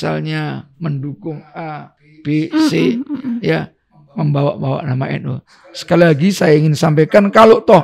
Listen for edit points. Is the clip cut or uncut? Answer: uncut